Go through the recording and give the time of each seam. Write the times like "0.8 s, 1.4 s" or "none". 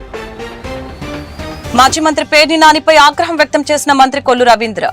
1.6 s